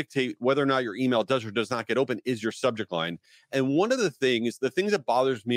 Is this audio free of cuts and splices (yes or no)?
yes